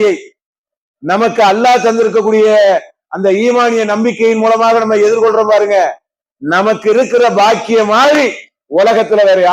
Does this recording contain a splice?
no; 0 cuts

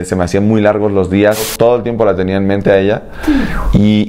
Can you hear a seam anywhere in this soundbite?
yes; 1 cut; at 1.5 s

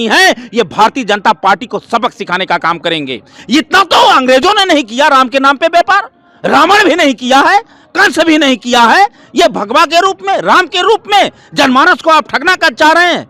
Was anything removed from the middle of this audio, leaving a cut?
no; 0 cuts

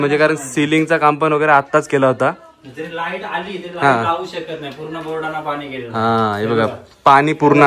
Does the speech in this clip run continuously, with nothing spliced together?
yes; 0 cuts

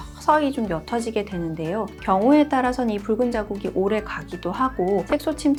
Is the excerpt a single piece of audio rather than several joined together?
yes; 0 cuts

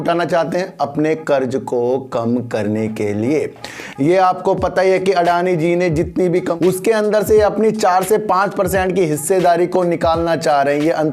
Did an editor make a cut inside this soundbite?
yes; 1 cut; at 6.5 s

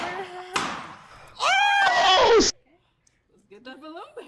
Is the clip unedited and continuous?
no; 1 cut; at 2.6 s

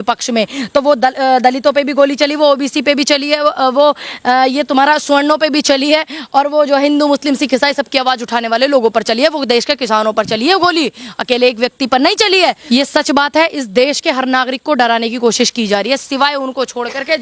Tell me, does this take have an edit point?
yes; 1 cut; at 12.6 s

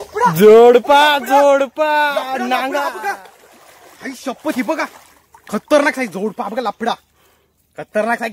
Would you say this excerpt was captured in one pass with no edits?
yes; 0 cuts

